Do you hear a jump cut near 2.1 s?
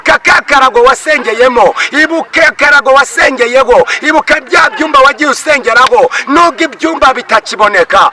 no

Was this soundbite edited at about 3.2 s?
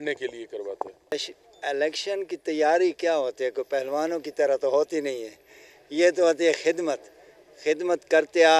no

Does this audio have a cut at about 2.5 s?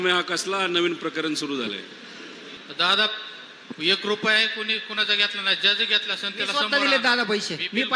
yes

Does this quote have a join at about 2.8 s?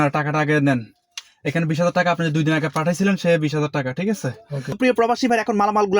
no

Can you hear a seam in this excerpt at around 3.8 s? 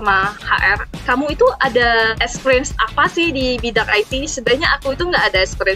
no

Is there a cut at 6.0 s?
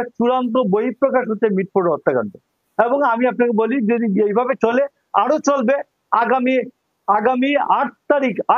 no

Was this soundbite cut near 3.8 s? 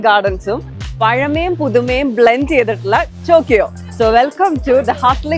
yes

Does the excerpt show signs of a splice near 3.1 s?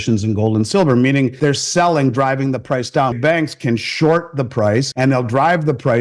yes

